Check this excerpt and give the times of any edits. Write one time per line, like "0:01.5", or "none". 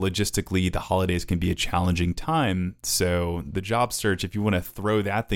none